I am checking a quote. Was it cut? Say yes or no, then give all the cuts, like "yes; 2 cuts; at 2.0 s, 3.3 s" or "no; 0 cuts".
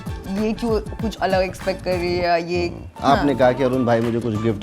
yes; 1 cut; at 2.9 s